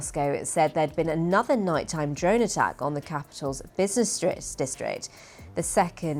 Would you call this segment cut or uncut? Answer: uncut